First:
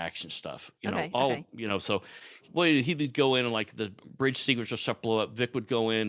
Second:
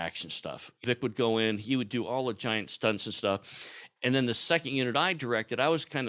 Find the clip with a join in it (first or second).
second